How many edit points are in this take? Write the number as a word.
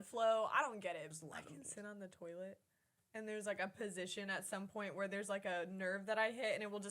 one